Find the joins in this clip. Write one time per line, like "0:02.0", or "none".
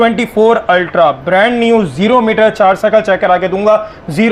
none